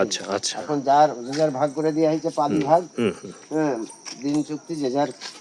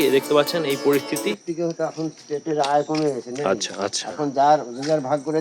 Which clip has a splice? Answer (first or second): second